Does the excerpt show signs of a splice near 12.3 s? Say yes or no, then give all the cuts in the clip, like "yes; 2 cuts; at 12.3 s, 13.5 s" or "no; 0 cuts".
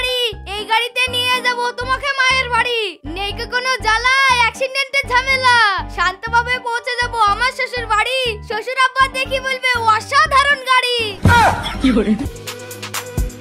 yes; 1 cut; at 12.3 s